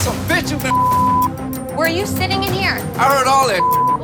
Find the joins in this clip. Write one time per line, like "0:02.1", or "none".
none